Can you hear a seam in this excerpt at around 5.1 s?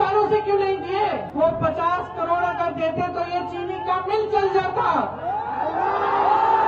no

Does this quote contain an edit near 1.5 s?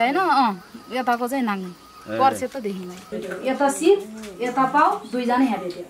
no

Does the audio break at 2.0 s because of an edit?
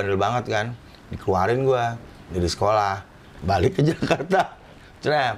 no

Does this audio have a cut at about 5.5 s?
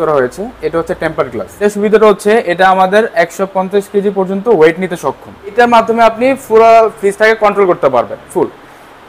yes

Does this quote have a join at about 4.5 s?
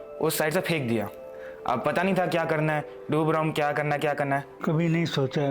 yes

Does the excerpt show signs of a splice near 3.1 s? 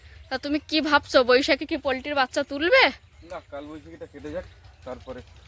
no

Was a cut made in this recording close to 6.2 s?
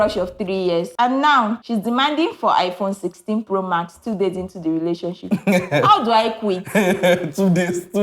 no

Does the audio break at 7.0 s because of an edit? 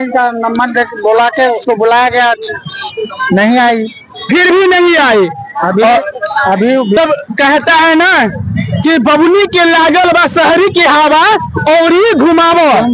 yes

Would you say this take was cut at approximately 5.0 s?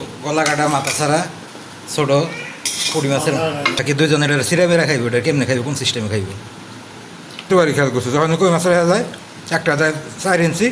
no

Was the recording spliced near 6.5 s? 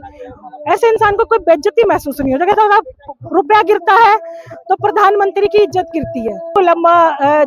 yes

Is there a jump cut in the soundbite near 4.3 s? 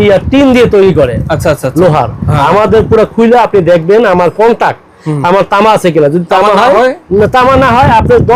no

